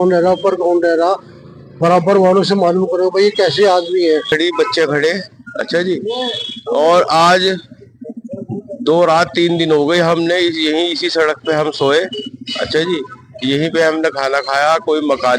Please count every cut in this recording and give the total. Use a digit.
1